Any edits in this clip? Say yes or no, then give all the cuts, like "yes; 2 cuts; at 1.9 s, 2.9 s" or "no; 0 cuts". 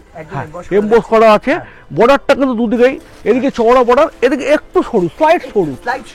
no; 0 cuts